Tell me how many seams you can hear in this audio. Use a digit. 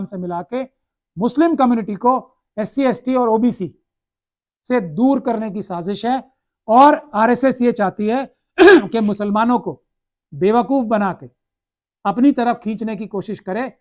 0